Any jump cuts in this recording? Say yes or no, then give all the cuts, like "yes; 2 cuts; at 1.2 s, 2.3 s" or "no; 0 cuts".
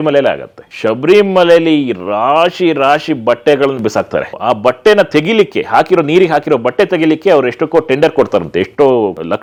no; 0 cuts